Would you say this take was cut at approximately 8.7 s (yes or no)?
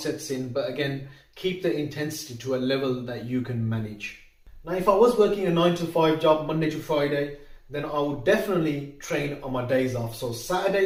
no